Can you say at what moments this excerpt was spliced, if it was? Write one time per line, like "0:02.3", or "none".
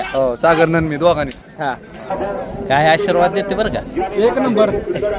0:02.1